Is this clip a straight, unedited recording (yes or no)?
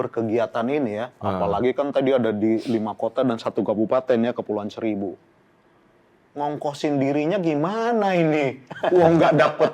yes